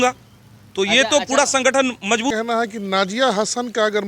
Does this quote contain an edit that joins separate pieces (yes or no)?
yes